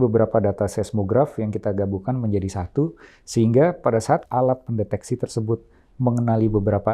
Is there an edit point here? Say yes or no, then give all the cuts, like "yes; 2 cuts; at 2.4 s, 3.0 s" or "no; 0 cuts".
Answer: yes; 1 cut; at 4.2 s